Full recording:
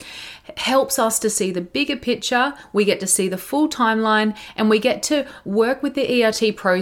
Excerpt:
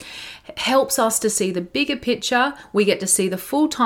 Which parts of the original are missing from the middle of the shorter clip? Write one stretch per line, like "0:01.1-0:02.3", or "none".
none